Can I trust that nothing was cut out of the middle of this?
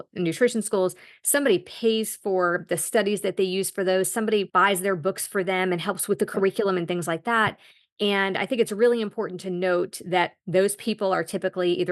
no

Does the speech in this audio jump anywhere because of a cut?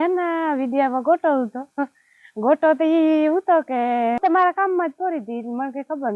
yes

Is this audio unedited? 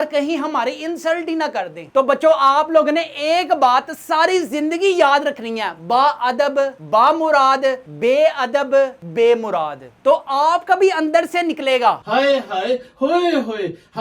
no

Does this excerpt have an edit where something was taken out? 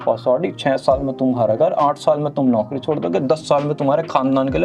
no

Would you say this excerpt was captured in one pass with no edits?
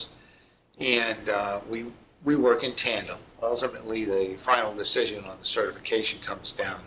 no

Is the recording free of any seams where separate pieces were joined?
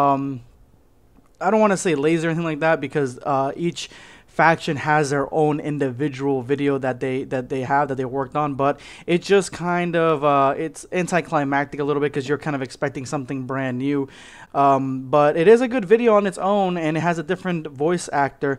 no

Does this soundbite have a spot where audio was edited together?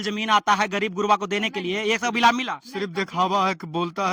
no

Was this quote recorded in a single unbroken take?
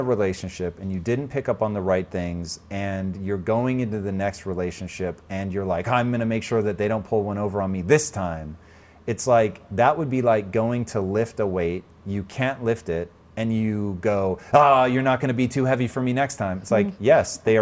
yes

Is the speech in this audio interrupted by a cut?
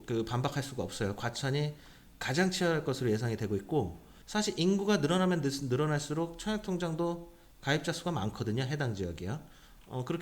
yes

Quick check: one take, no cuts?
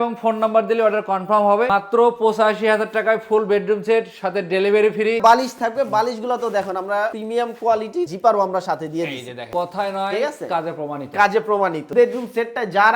no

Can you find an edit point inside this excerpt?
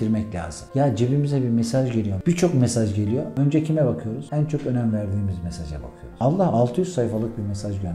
no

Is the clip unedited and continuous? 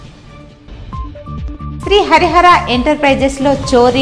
yes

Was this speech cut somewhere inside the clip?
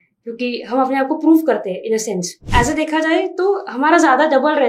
yes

